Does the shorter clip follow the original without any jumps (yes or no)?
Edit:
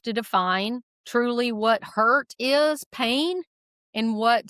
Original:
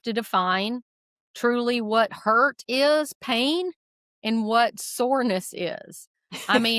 no